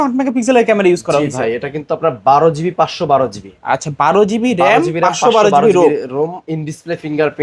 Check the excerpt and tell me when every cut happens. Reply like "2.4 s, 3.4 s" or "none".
none